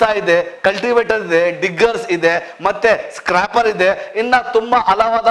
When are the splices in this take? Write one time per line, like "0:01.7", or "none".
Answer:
none